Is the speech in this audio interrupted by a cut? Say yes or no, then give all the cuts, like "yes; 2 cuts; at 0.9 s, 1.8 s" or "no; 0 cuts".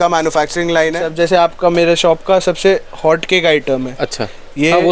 yes; 1 cut; at 1.1 s